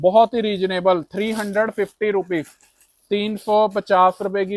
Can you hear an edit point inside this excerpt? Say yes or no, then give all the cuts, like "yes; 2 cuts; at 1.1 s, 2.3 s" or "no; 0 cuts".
no; 0 cuts